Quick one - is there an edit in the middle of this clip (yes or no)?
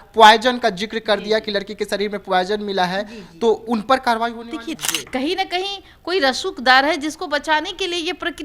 yes